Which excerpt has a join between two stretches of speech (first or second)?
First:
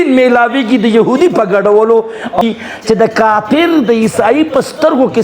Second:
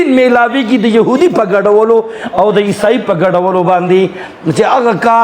first